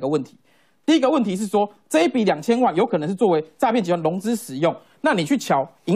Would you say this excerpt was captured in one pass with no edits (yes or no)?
yes